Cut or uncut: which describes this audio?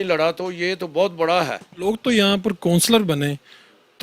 cut